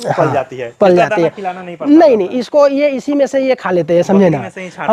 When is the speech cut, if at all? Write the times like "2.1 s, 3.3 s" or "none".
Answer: none